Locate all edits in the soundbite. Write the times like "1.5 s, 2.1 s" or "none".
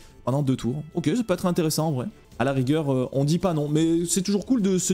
2.2 s